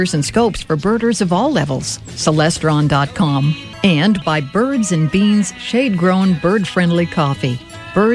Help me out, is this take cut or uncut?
cut